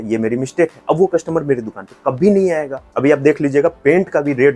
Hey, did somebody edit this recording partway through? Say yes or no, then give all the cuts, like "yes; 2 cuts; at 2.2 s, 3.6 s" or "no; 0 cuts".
yes; 1 cut; at 2.8 s